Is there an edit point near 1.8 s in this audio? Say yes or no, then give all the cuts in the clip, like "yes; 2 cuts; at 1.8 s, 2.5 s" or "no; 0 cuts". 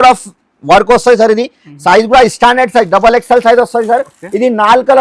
no; 0 cuts